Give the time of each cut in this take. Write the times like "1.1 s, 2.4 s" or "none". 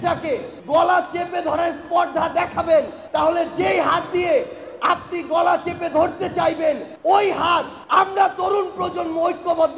none